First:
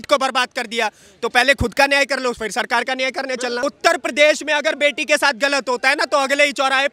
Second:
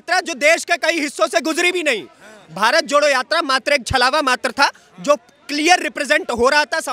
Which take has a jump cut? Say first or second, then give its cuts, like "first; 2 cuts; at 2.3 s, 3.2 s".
first; 1 cut; at 3.6 s